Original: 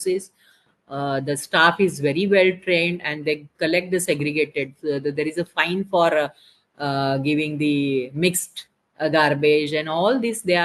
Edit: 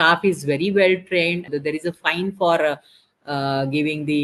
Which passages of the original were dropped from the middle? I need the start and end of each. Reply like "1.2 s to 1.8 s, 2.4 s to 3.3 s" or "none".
3.0 s to 5.0 s